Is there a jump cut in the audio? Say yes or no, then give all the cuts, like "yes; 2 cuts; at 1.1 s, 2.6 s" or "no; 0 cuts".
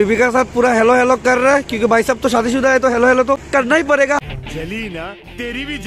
no; 0 cuts